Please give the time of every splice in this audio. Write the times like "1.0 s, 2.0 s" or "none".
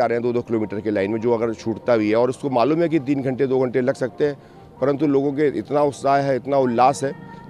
none